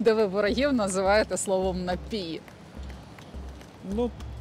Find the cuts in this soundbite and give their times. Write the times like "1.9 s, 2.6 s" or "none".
none